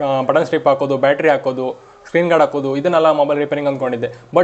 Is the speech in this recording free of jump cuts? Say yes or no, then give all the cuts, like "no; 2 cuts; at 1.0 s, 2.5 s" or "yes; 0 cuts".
yes; 0 cuts